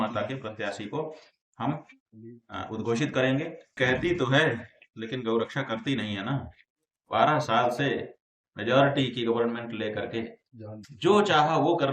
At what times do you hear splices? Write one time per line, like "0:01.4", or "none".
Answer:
0:03.8